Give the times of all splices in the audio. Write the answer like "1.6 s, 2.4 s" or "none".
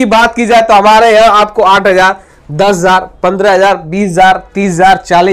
none